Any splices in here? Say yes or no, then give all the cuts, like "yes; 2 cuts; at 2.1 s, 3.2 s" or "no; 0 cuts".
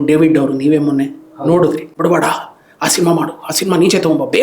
yes; 1 cut; at 1.9 s